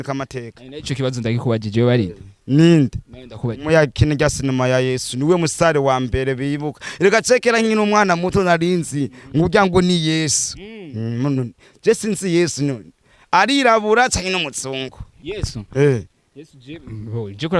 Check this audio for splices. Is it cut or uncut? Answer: uncut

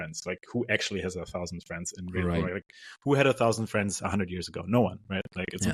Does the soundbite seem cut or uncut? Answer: uncut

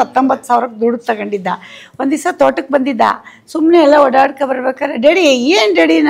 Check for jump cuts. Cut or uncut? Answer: uncut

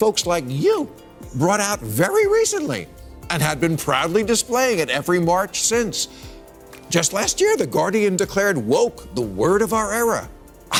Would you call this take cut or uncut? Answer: uncut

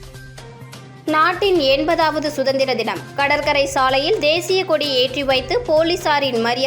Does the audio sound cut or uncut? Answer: cut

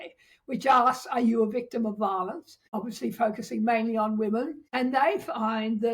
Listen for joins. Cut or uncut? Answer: cut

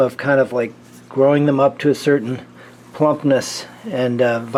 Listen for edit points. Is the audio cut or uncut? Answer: uncut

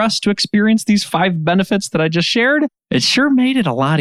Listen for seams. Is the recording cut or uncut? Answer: cut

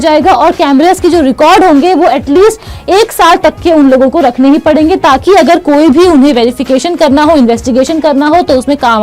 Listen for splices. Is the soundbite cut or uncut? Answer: uncut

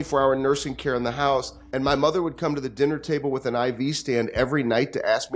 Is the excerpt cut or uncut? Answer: cut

